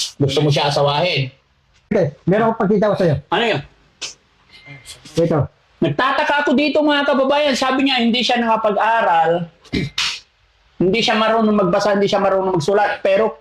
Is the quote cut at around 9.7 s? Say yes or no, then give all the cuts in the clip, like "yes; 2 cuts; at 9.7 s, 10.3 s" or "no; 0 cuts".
no; 1 cut; at 1.9 s